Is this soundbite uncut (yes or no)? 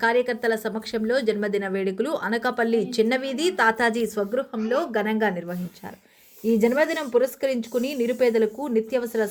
yes